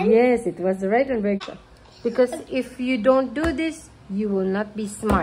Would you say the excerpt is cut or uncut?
cut